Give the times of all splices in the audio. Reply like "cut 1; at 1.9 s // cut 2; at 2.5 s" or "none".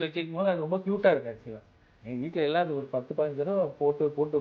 cut 1; at 1.8 s